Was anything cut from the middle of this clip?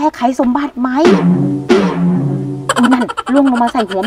yes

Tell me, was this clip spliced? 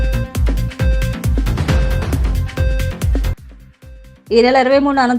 no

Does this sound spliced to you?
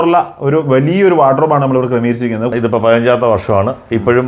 yes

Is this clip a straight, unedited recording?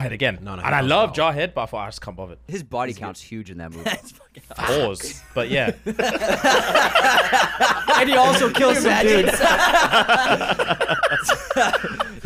no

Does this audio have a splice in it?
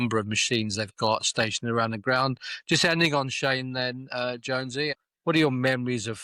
yes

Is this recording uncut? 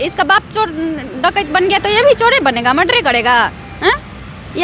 yes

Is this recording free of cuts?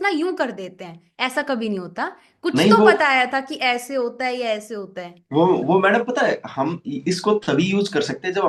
yes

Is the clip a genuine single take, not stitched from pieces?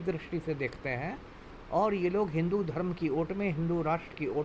yes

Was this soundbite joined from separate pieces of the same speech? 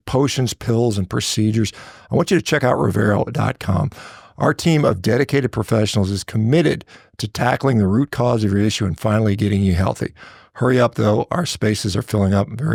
no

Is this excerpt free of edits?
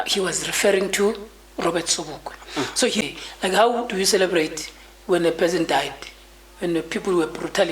no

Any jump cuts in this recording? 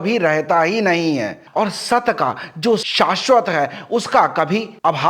yes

